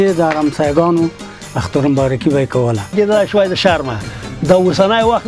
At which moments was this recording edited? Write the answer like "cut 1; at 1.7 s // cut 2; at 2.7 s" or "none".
cut 1; at 2.9 s